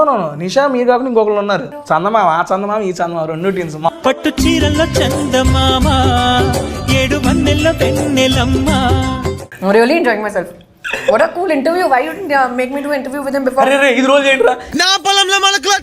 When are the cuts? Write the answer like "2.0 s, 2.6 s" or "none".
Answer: 1.7 s, 3.9 s, 9.4 s